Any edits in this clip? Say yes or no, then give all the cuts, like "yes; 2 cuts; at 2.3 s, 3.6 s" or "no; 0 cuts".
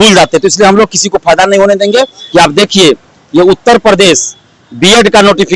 yes; 1 cut; at 2.2 s